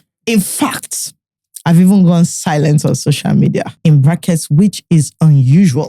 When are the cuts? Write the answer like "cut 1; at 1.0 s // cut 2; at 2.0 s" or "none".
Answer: cut 1; at 3.7 s

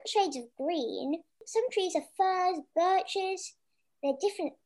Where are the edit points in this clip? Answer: cut 1; at 1.5 s

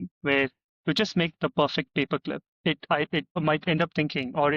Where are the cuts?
cut 1; at 2.5 s // cut 2; at 3.4 s

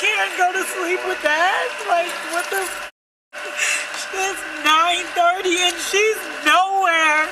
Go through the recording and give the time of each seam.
none

